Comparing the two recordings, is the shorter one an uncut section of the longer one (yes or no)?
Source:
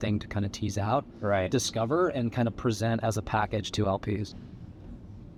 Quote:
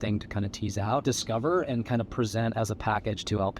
no